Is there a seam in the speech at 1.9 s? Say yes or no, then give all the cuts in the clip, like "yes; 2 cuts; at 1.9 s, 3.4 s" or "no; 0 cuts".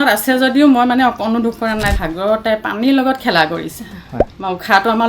yes; 1 cut; at 1.9 s